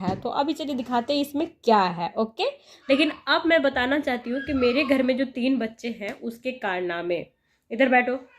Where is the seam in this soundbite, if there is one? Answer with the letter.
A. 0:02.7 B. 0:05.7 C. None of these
A